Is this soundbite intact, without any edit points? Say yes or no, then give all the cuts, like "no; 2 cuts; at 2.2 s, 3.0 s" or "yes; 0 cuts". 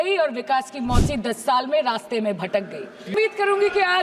no; 1 cut; at 3.1 s